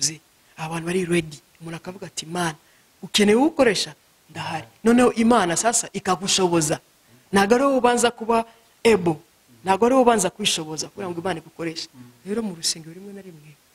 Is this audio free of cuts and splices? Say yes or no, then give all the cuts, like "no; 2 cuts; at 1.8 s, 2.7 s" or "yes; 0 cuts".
no; 1 cut; at 11.8 s